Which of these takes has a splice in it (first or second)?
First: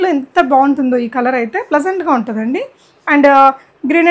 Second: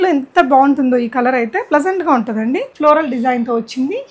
second